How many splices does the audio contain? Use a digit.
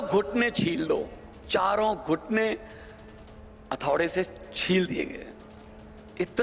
1